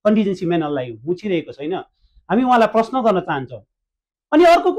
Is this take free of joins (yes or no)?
yes